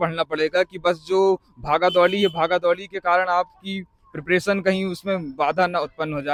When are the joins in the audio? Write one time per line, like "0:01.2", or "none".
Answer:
none